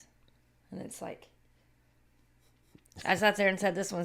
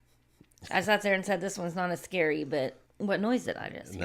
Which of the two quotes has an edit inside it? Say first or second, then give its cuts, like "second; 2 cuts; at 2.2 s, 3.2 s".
second; 1 cut; at 2.8 s